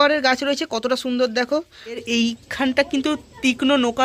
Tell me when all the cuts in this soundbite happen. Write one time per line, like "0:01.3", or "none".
0:02.0